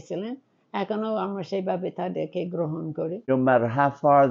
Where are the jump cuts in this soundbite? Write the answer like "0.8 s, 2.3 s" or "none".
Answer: 3.2 s